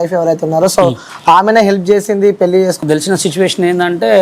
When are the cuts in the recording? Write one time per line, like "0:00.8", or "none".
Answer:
0:02.8

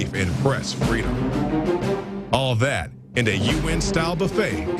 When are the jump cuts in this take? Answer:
none

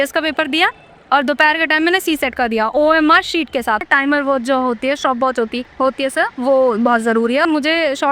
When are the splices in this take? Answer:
0:03.8
0:05.6
0:07.4

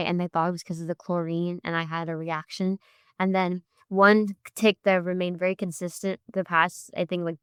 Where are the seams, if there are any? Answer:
none

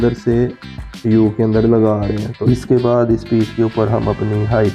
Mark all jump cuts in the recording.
0:02.3

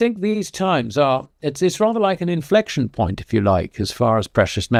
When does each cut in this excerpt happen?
none

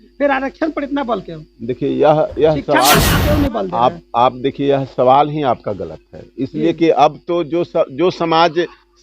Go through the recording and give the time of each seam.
0:03.1

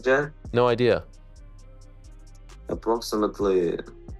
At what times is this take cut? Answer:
none

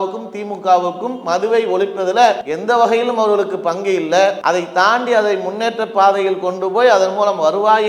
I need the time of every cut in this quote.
0:02.5
0:04.4

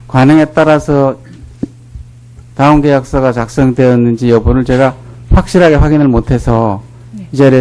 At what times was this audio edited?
0:05.1

